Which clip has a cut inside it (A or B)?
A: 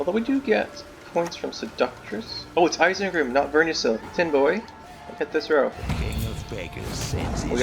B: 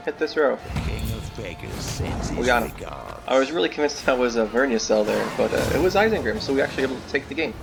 A